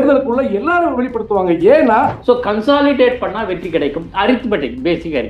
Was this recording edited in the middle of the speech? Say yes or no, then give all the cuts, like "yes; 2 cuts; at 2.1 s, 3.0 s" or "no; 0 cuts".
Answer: yes; 1 cut; at 2.1 s